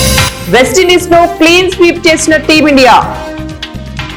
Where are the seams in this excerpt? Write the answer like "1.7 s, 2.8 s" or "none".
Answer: none